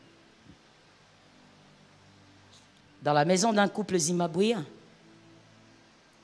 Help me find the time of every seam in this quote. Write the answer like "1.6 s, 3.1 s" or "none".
none

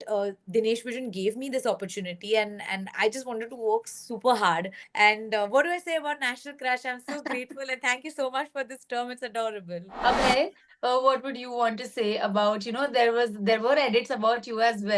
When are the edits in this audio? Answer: 4.8 s, 9.9 s

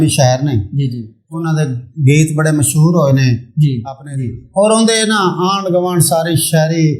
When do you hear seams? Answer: 3.8 s

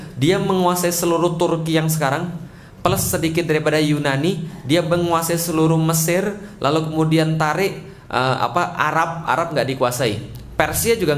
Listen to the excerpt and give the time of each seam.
none

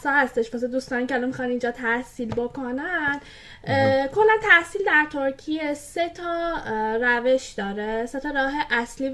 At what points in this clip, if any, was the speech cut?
none

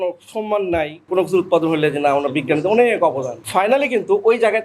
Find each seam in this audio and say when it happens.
1.1 s, 3.4 s

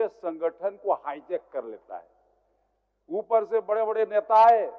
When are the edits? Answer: none

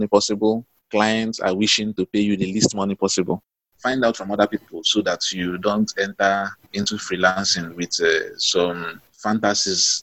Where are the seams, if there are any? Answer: 3.6 s

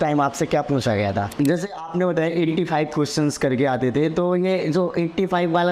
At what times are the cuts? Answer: 1.3 s

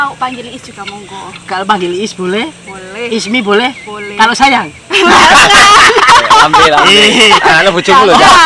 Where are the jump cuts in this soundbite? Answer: none

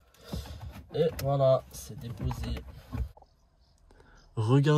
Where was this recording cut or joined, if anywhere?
3.5 s

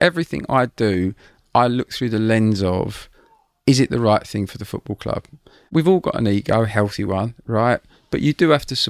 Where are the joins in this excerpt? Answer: none

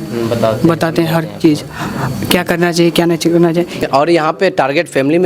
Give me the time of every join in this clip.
3.8 s

